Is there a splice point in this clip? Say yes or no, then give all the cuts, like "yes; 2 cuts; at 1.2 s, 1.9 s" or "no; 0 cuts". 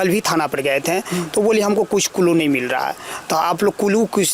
no; 0 cuts